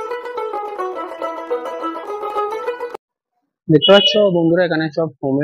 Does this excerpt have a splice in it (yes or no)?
yes